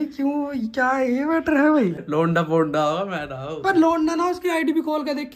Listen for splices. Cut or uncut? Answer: cut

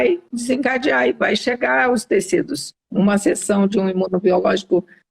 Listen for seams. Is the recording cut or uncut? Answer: cut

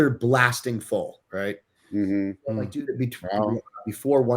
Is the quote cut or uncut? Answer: cut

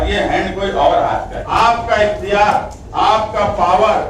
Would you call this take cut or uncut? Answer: cut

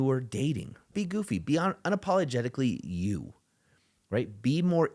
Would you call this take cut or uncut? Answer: cut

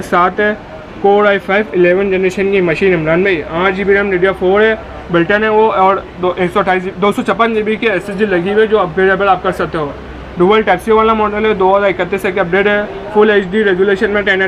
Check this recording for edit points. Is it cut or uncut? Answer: uncut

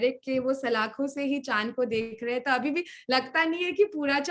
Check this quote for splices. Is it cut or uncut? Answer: uncut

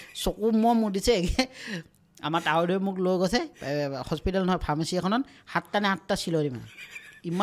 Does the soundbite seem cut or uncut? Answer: uncut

